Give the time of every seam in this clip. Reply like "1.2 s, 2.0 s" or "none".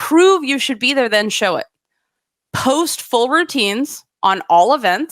none